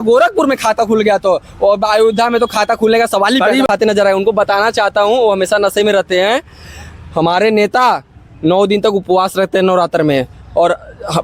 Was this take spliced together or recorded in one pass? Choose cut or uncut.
cut